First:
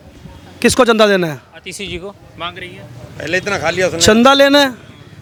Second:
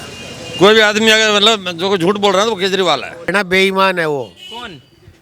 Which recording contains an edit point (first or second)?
second